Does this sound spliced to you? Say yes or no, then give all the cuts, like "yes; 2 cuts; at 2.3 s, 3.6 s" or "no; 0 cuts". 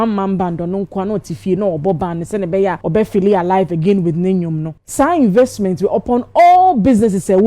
yes; 1 cut; at 2.8 s